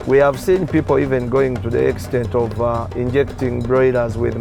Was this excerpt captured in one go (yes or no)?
yes